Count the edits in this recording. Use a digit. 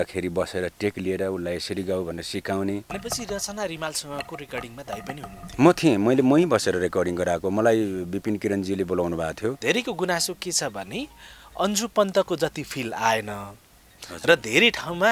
2